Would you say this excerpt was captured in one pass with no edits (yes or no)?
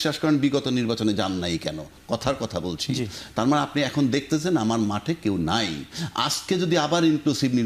yes